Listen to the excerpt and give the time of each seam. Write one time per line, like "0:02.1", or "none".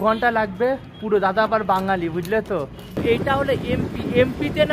0:03.0